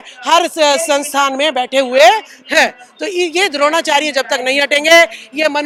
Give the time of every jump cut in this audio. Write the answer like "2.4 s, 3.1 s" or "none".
none